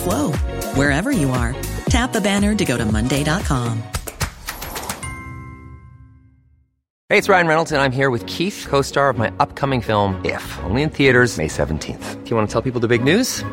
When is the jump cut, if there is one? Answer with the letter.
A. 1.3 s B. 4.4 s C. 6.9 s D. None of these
C